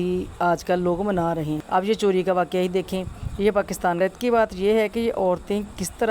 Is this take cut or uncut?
cut